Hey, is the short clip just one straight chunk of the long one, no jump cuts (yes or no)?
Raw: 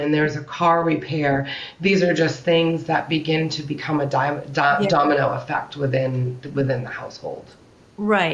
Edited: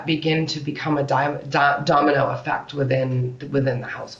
yes